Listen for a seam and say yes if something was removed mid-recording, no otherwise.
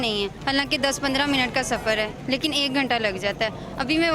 no